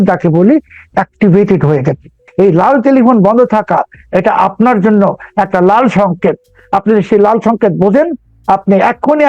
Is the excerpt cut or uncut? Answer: cut